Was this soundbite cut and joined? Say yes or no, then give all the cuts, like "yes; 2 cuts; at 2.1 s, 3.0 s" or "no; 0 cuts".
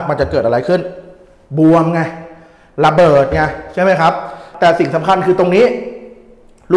yes; 1 cut; at 4.5 s